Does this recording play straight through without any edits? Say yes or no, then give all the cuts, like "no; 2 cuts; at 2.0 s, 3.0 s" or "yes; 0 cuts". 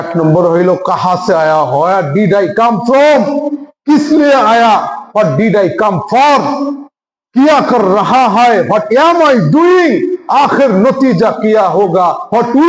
yes; 0 cuts